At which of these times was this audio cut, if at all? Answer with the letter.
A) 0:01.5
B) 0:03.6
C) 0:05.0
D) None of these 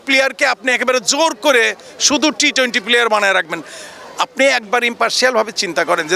D